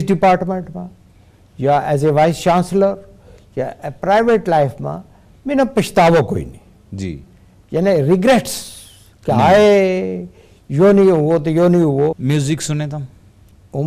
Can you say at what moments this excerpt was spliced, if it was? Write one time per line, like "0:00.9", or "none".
0:12.2